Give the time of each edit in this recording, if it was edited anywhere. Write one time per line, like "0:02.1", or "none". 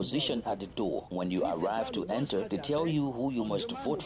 0:01.1
0:02.5